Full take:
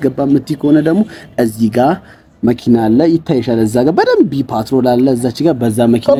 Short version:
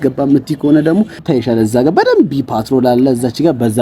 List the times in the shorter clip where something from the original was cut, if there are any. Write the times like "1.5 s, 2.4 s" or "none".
1.2 s

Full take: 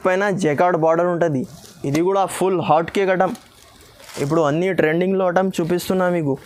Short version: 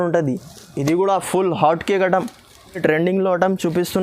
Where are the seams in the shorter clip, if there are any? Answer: 2.8 s

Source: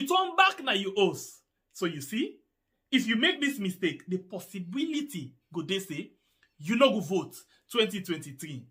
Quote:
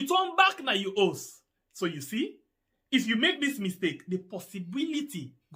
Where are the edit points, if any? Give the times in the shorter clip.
none

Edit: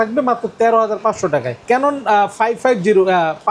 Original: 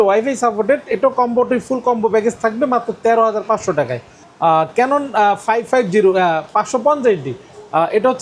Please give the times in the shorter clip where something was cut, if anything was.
1.6 s

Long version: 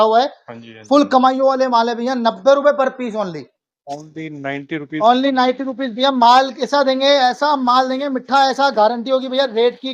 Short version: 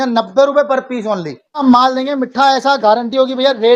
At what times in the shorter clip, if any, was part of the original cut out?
1.6 s

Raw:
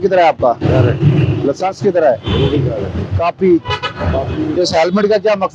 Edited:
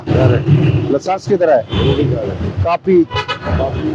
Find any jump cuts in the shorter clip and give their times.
none

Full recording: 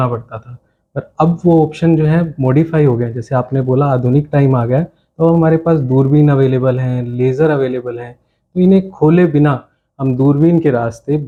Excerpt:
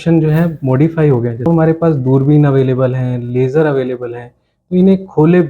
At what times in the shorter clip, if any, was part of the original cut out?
1.5 s

